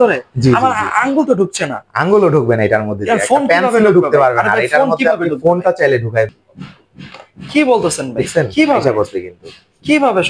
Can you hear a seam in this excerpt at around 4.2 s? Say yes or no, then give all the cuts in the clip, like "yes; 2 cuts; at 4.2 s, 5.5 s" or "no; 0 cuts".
no; 0 cuts